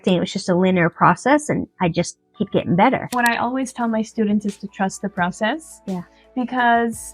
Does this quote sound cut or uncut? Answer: cut